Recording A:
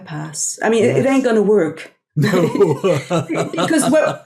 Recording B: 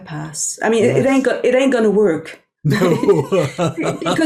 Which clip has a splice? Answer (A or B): A